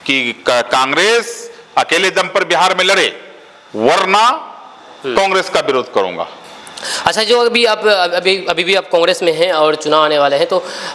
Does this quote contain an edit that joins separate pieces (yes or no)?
no